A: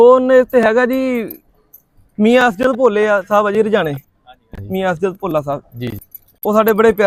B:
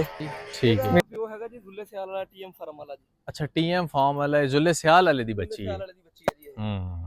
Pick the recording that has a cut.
B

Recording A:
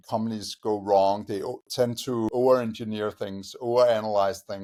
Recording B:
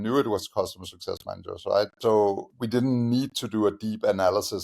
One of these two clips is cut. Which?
B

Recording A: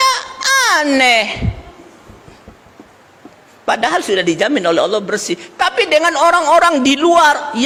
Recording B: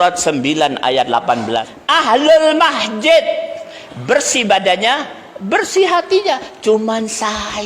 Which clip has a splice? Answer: B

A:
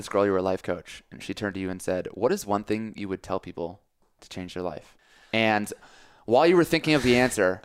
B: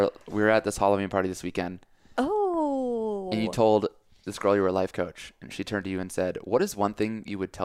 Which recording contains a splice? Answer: A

